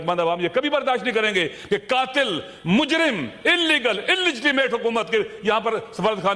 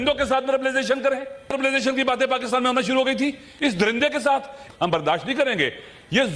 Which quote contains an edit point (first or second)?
second